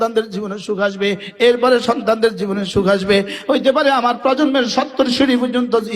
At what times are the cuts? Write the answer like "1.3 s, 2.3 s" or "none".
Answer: 3.4 s